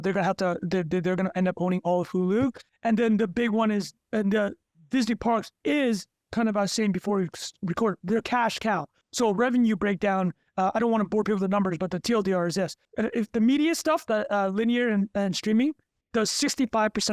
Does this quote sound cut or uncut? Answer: cut